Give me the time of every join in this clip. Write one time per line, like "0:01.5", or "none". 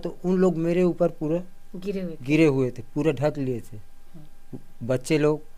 none